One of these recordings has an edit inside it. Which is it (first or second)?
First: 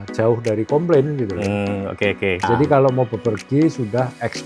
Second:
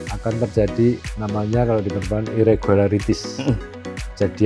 first